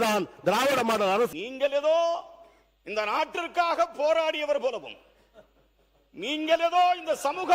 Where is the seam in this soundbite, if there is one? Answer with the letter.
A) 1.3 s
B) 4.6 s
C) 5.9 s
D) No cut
A